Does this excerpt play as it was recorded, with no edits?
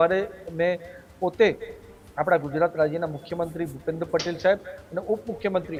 yes; 0 cuts

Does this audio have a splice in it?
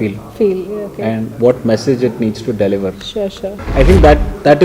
yes; 1 cut; at 3.6 s

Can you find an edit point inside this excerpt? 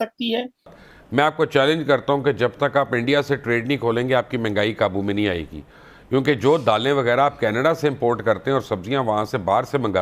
yes; 1 cut; at 0.9 s

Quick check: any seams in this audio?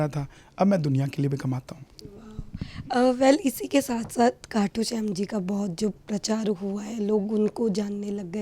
no; 0 cuts

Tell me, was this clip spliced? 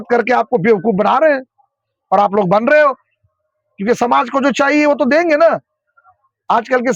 no; 0 cuts

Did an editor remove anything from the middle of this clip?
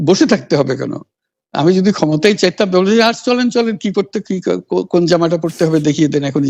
no; 0 cuts

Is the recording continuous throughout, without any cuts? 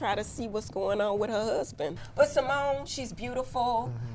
no; 1 cut; at 2.0 s

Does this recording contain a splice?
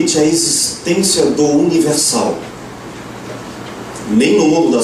no; 0 cuts

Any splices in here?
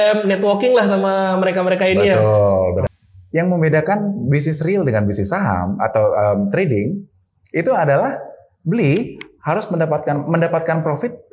yes; 1 cut; at 2.9 s

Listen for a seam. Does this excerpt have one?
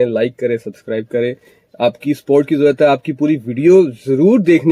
no; 0 cuts

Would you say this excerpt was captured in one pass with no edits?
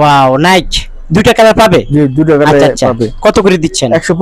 yes; 0 cuts

